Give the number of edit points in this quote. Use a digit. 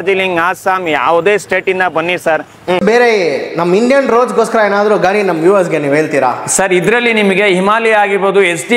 1